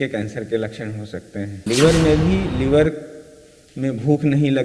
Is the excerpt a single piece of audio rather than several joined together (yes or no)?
no